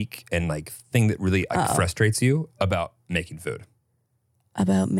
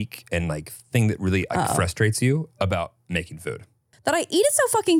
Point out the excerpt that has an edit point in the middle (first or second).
second